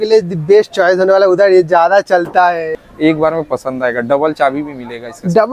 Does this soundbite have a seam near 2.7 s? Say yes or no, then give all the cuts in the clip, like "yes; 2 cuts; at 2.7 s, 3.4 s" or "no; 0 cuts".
yes; 1 cut; at 2.7 s